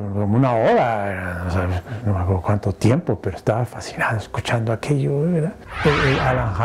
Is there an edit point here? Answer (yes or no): yes